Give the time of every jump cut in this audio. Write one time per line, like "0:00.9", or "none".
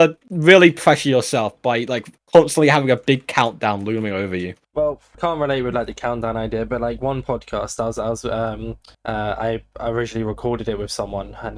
none